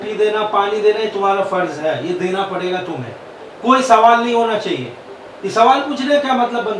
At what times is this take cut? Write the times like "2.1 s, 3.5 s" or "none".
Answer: none